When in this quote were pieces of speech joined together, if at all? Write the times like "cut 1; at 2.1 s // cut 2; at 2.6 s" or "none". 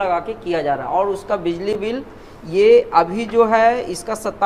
none